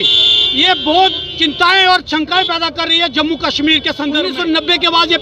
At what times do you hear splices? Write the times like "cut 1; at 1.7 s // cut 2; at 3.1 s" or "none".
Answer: cut 1; at 4.3 s